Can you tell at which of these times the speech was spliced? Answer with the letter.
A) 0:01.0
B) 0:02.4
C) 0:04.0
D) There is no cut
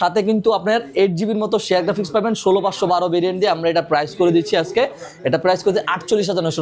D